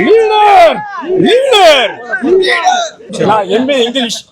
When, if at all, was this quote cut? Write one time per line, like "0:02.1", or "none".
0:03.0